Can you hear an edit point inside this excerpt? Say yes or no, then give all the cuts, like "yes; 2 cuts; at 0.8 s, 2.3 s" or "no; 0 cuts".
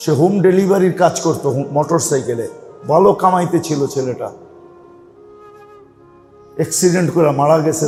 no; 0 cuts